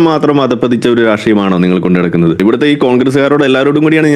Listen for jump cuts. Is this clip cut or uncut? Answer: cut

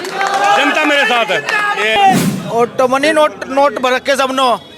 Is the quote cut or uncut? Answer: cut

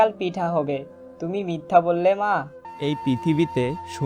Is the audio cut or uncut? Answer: cut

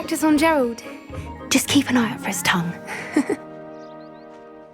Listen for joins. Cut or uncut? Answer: cut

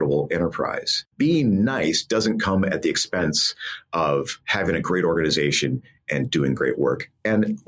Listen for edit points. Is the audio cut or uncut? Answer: cut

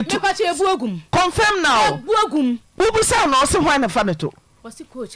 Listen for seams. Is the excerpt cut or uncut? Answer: cut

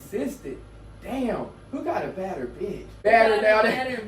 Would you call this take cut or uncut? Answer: cut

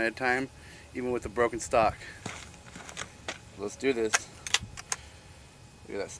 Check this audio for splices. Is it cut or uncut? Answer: cut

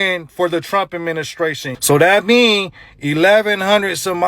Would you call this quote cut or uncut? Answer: cut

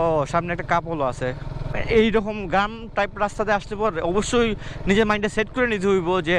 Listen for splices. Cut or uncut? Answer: cut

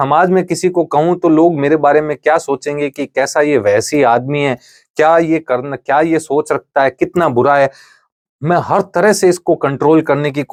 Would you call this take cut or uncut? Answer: uncut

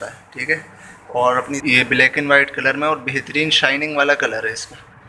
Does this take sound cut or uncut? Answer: cut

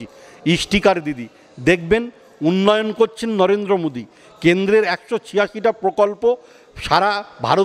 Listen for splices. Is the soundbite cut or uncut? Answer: uncut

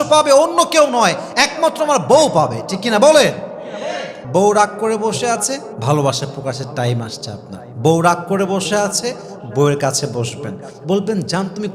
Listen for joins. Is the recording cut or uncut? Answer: cut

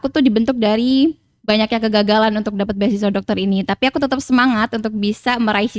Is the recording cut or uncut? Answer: uncut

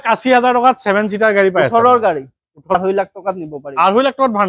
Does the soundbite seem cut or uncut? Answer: cut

